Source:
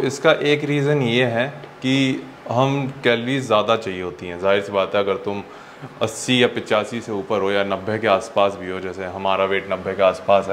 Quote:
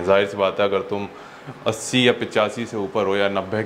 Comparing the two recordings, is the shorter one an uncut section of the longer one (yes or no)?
yes